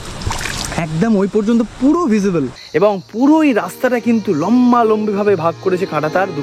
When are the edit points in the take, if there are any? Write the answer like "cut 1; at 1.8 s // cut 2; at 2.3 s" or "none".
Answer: cut 1; at 2.6 s